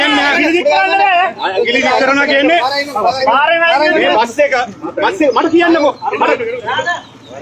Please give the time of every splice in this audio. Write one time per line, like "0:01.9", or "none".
none

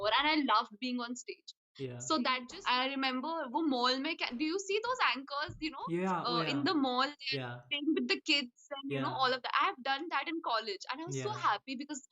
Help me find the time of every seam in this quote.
0:02.5

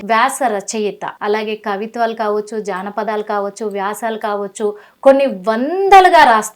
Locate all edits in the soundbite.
0:01.1

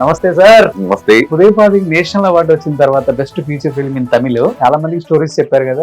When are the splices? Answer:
0:01.3
0:04.6

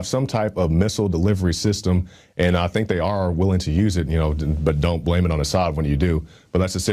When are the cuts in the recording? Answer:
none

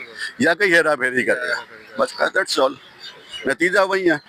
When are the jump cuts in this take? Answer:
none

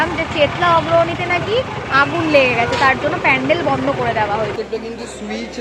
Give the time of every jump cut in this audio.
0:04.5

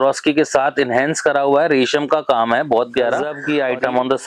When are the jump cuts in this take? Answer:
0:03.3

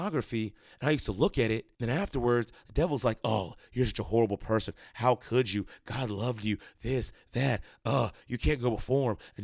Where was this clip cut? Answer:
none

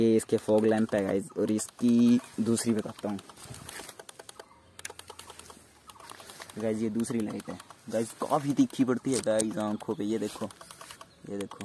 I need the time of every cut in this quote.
none

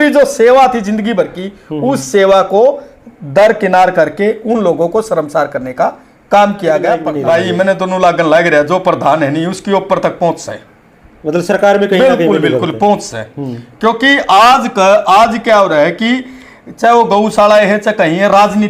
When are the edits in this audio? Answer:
0:07.1

